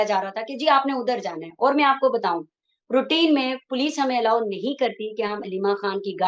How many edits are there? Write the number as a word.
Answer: zero